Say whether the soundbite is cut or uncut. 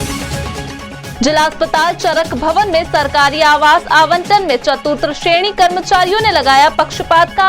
uncut